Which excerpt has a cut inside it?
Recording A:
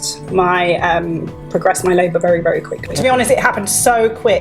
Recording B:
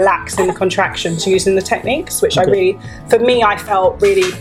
A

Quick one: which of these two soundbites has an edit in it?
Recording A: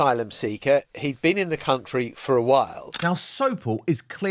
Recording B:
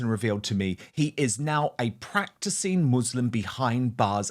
A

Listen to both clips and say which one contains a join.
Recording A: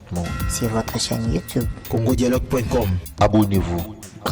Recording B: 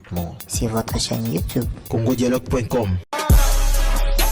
A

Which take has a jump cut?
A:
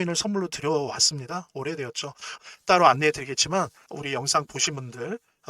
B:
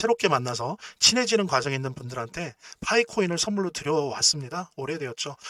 A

